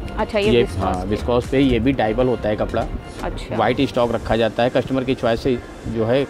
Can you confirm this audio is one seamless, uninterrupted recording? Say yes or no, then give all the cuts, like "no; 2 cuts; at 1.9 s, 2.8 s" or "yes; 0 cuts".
yes; 0 cuts